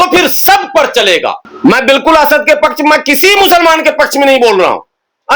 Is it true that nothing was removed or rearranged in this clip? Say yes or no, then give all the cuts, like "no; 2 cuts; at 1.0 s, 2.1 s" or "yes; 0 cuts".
no; 1 cut; at 1.5 s